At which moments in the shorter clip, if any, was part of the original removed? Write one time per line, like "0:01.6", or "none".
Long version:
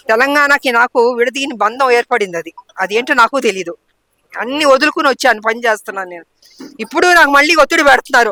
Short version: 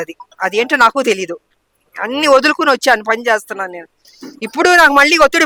none